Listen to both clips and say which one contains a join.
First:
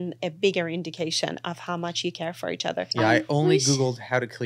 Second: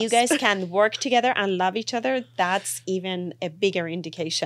first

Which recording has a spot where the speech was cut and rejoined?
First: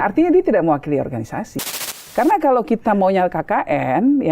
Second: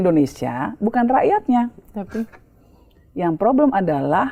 first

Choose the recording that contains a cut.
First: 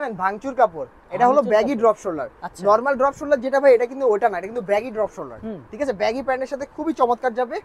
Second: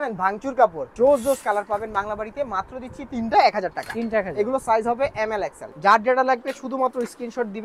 second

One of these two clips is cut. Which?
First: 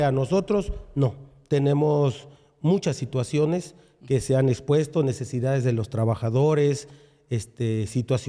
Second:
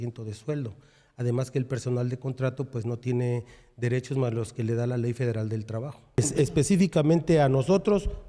second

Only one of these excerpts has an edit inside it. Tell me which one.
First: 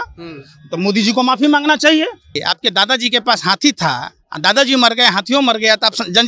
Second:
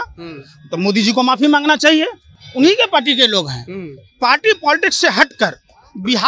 first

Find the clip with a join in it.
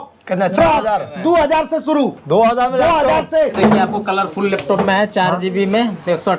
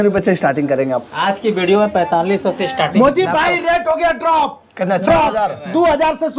first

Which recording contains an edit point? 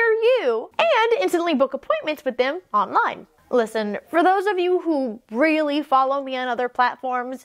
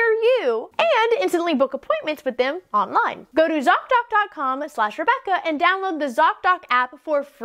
second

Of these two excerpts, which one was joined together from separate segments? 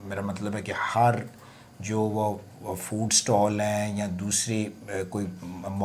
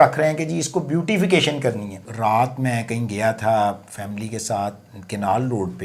second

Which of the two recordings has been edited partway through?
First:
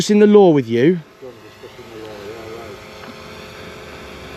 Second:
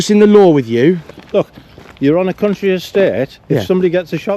second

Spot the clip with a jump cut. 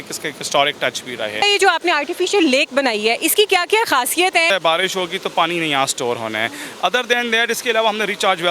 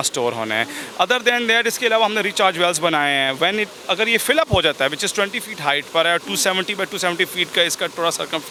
first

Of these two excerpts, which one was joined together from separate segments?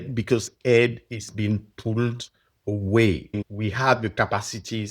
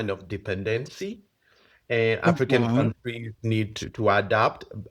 first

